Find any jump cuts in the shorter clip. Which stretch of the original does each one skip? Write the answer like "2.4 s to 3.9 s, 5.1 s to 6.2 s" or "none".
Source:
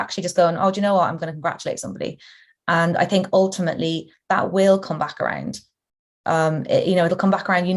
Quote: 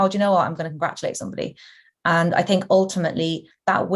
none